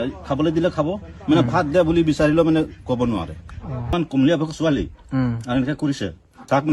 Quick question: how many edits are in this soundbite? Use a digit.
1